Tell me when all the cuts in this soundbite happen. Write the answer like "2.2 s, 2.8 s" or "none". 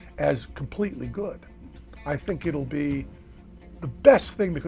none